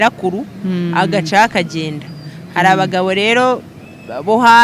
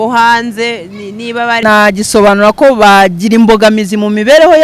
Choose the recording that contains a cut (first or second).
second